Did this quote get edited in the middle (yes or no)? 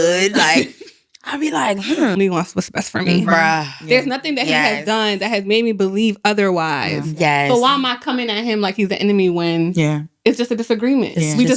yes